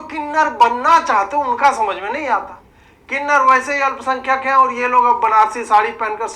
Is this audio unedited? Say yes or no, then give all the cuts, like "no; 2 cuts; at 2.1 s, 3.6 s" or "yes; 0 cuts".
yes; 0 cuts